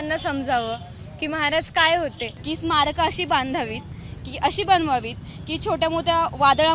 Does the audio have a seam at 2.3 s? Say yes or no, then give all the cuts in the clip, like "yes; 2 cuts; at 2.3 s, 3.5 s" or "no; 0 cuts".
yes; 1 cut; at 2.3 s